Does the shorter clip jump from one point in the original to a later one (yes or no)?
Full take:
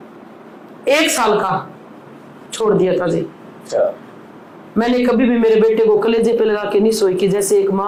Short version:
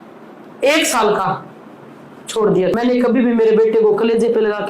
yes